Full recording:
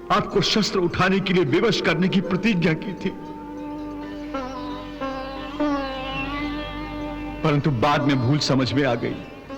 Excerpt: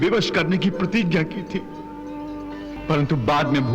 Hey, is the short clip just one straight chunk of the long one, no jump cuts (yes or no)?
no